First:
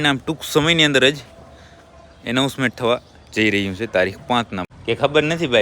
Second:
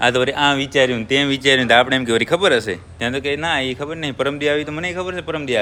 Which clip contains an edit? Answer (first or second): first